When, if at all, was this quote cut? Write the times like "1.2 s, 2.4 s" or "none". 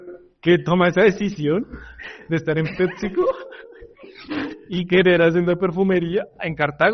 none